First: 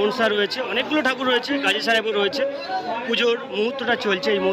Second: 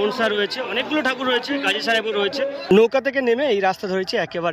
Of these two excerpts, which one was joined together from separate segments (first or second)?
second